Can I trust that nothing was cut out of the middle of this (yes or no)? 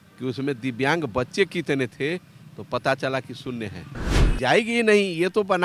no